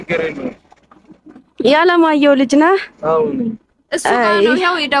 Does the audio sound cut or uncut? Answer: uncut